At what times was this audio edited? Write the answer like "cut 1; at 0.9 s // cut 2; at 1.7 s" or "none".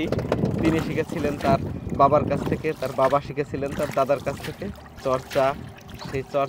cut 1; at 5.0 s

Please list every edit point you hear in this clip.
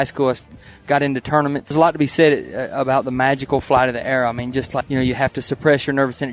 cut 1; at 1.7 s // cut 2; at 4.8 s

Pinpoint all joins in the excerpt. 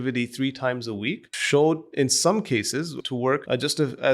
cut 1; at 1.3 s // cut 2; at 3.0 s

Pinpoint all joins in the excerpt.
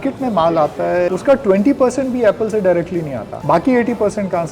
cut 1; at 1.1 s // cut 2; at 3.3 s

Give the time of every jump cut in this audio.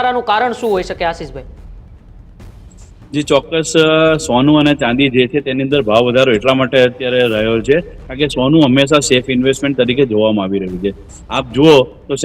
none

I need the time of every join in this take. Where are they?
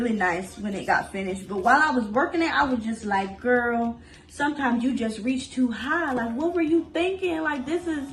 none

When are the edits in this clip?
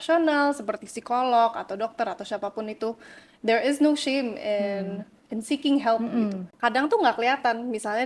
cut 1; at 6.5 s

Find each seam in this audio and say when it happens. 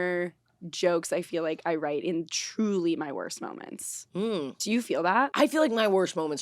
cut 1; at 5.3 s

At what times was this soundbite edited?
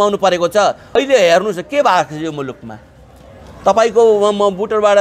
cut 1; at 1.0 s

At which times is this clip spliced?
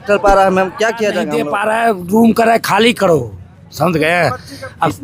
cut 1; at 1.3 s

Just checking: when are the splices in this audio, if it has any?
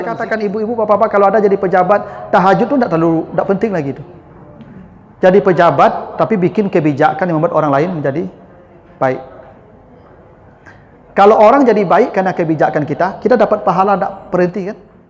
none

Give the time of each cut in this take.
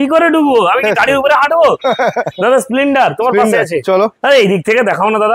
none

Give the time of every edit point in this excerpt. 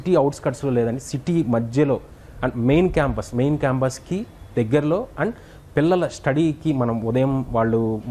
none

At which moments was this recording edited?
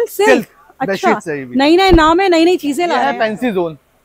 cut 1; at 3.0 s

